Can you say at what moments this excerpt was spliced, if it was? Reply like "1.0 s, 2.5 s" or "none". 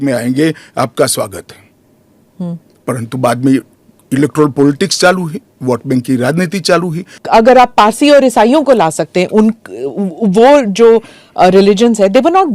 7.2 s